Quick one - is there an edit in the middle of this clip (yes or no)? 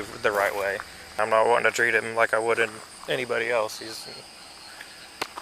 yes